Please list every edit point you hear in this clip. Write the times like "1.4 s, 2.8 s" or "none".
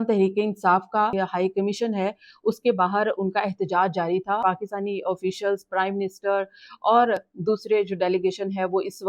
1.1 s, 4.4 s

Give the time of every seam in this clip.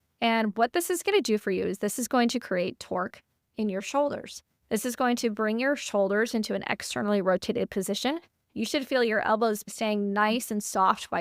9.7 s

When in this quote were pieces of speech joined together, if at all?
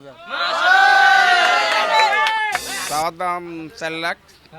2.7 s

